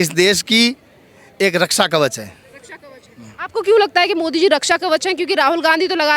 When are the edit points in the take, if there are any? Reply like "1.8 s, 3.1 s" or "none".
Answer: none